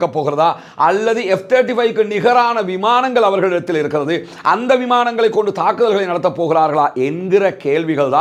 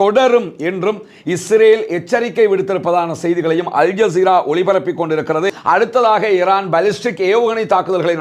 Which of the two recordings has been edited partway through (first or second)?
second